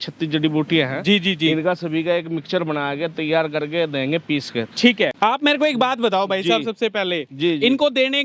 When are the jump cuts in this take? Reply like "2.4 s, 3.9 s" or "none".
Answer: none